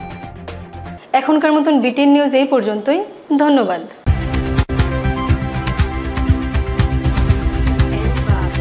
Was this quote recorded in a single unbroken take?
yes; 0 cuts

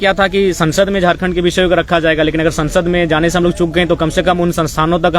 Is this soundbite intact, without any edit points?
yes; 0 cuts

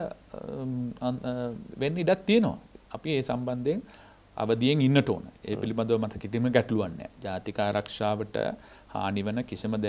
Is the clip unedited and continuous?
yes; 0 cuts

